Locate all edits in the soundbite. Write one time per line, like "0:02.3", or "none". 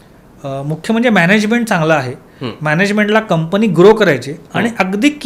none